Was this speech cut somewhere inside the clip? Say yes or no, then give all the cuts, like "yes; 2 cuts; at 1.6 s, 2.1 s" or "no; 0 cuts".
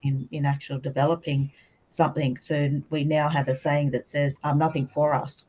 yes; 1 cut; at 4.3 s